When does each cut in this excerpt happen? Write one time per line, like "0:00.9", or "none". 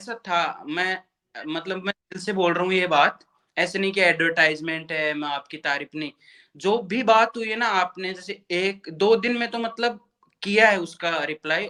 none